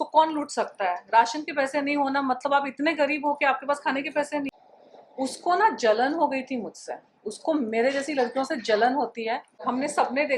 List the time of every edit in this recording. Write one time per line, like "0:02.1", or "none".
0:04.6
0:09.5